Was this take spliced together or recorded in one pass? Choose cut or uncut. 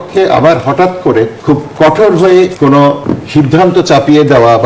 cut